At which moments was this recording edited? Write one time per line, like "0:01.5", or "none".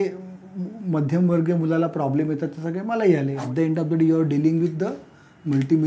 0:03.4